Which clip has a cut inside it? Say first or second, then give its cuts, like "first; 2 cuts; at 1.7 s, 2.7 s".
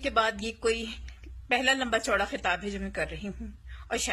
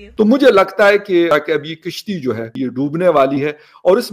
second; 2 cuts; at 1.3 s, 2.5 s